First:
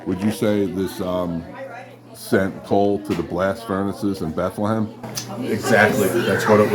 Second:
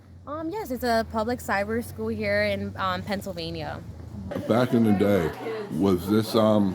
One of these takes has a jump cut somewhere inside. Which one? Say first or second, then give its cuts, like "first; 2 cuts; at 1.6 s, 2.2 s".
second; 1 cut; at 4.3 s